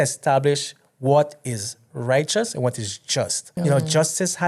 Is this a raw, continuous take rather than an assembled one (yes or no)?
no